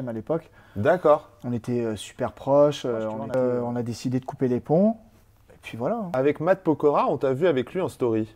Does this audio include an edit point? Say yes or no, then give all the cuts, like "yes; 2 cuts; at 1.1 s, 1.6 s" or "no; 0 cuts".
yes; 2 cuts; at 3.4 s, 6.1 s